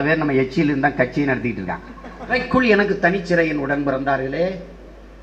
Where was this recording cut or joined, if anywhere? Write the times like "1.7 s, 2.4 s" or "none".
2.3 s